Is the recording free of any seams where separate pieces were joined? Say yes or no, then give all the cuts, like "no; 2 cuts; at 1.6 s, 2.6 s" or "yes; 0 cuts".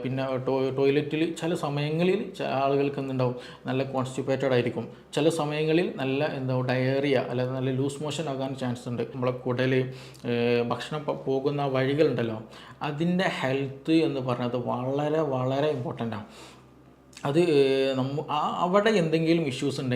no; 1 cut; at 9.1 s